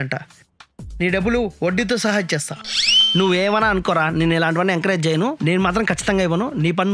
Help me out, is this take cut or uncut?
uncut